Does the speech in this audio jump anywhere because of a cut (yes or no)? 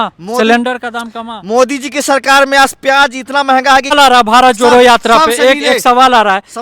yes